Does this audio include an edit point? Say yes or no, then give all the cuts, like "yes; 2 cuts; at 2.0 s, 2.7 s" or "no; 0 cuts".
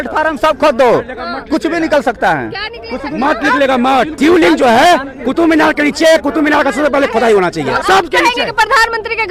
yes; 2 cuts; at 4.1 s, 7.8 s